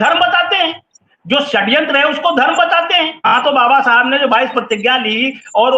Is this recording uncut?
no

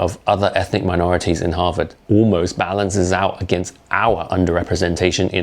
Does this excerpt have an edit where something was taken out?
yes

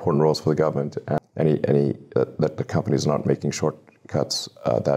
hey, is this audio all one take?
no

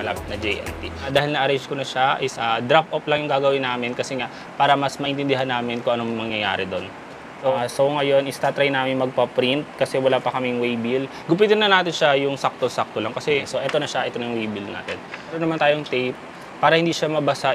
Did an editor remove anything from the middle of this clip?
yes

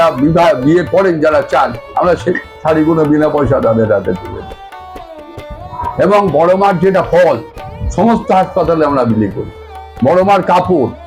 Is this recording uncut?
yes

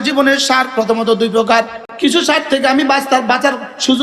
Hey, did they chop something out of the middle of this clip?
yes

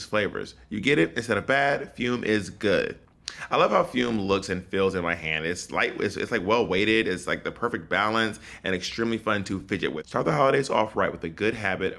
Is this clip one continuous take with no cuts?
no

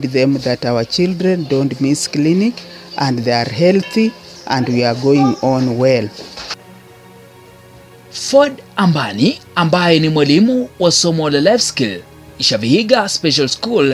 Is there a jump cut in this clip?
no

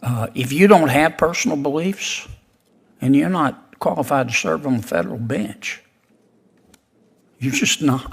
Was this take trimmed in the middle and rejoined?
no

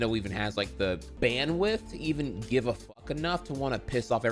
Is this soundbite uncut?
yes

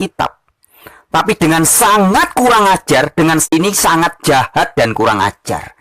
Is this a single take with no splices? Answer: no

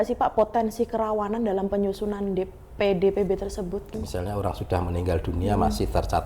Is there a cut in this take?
yes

